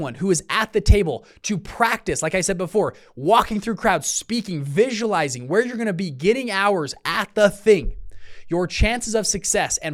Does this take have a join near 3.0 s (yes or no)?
no